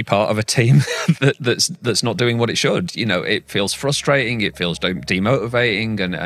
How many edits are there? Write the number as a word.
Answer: zero